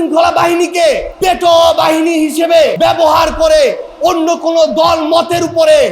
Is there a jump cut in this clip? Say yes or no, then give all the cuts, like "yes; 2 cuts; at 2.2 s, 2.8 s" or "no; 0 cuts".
yes; 2 cuts; at 1.1 s, 2.7 s